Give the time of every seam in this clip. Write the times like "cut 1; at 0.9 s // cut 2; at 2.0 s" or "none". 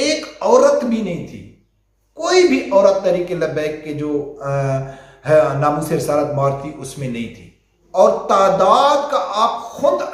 none